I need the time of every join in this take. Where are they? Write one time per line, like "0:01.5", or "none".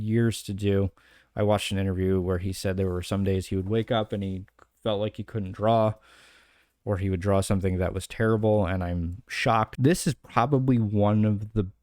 0:09.7